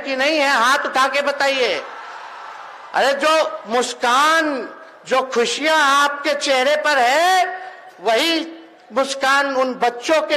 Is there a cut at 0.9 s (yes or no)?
no